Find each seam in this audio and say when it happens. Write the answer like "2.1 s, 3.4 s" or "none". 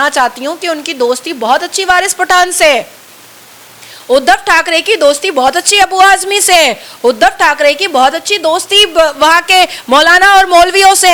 none